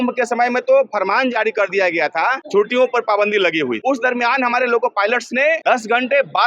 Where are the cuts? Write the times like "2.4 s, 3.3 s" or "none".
2.4 s, 3.8 s, 5.6 s